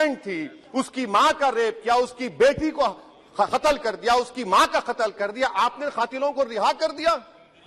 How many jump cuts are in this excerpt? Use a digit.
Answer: 0